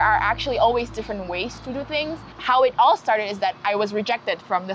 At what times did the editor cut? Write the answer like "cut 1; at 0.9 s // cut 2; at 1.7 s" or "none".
cut 1; at 2.3 s

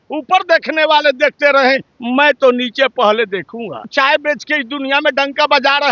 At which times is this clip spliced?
cut 1; at 3.9 s

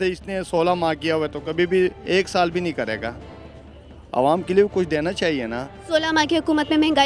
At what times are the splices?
none

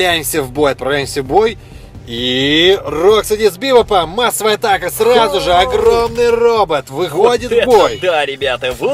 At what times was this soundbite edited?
none

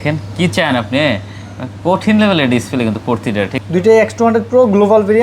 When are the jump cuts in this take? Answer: cut 1; at 3.6 s

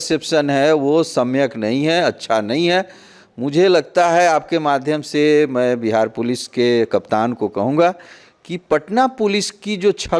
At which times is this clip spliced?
none

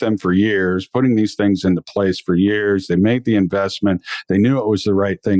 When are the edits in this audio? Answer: none

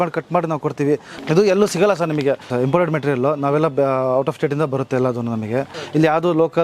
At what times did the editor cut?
cut 1; at 1.1 s // cut 2; at 2.5 s // cut 3; at 5.8 s

